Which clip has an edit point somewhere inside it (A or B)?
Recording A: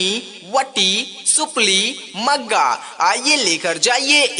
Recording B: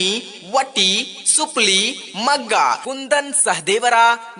A